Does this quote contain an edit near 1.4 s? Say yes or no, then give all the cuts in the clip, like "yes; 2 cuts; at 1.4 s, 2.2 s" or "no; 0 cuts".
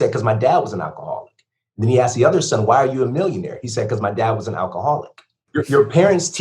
no; 1 cut; at 5.5 s